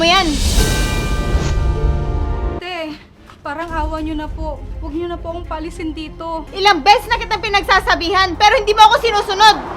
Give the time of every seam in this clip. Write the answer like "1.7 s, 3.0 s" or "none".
2.6 s, 6.5 s

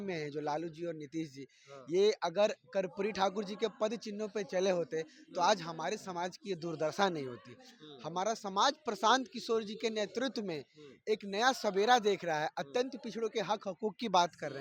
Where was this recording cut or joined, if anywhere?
none

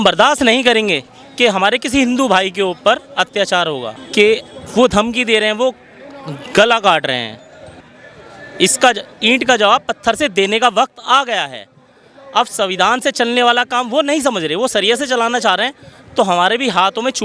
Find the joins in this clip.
4.0 s, 7.8 s

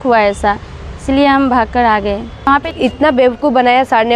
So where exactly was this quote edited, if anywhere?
2.7 s

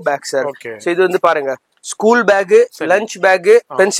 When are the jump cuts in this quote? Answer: none

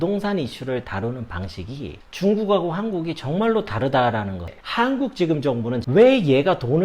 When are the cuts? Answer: 4.6 s, 5.8 s

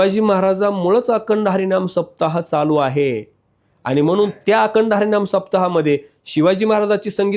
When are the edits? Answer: none

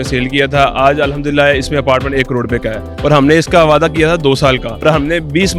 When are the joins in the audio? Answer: 2.8 s, 4.7 s

